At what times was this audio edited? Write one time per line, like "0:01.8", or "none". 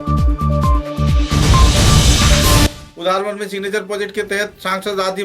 0:02.7